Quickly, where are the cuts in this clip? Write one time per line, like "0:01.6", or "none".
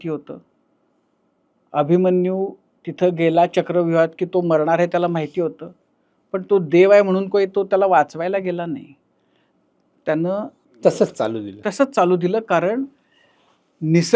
0:10.6